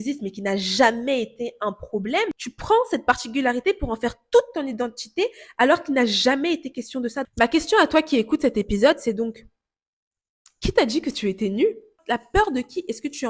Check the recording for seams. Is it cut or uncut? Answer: cut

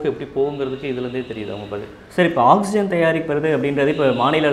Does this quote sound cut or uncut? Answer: uncut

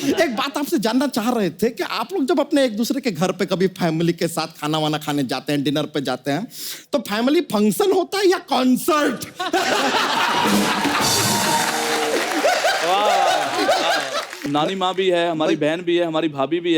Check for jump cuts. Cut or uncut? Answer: cut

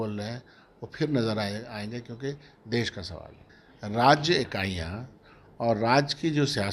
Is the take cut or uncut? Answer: cut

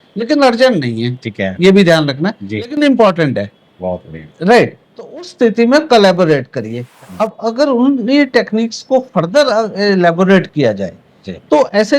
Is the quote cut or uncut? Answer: cut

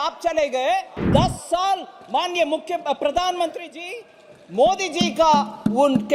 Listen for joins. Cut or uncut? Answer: cut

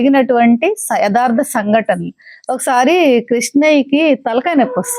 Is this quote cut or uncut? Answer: uncut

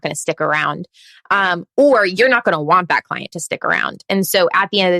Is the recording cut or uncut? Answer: uncut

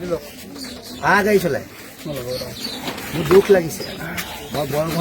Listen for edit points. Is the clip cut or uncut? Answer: uncut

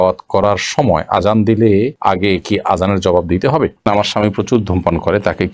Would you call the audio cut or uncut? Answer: cut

